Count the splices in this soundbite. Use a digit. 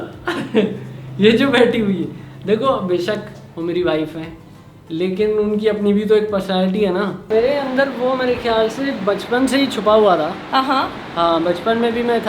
1